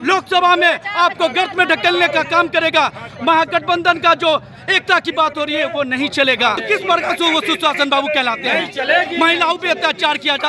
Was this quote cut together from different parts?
yes; 1 cut; at 6.6 s

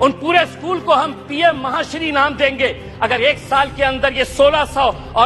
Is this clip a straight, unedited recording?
yes; 0 cuts

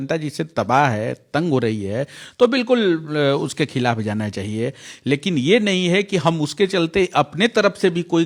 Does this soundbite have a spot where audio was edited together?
no; 0 cuts

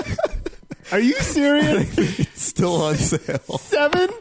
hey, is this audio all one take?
yes; 0 cuts

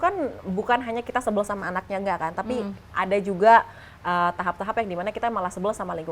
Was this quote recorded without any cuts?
yes; 0 cuts

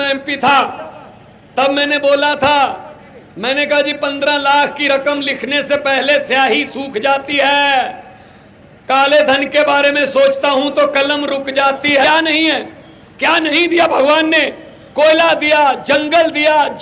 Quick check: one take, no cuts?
no; 1 cut; at 12.0 s

